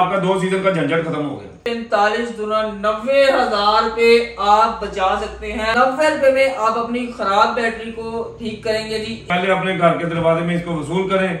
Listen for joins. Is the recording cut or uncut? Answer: cut